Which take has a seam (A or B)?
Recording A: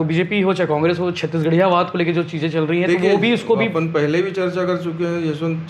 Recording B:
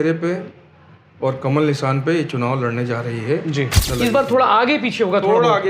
B